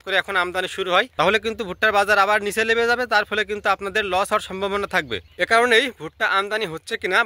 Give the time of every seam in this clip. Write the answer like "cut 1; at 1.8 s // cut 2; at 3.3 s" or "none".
cut 1; at 1.1 s // cut 2; at 5.2 s